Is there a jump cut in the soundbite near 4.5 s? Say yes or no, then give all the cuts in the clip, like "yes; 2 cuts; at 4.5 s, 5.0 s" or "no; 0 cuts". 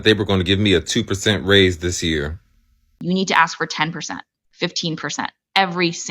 no; 1 cut; at 2.9 s